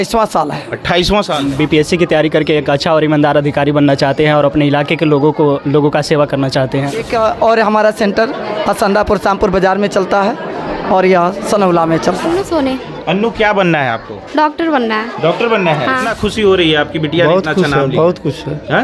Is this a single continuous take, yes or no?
no